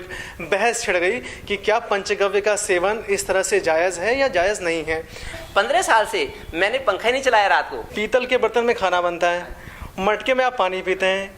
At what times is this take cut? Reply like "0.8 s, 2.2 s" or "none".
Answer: 5.4 s, 7.8 s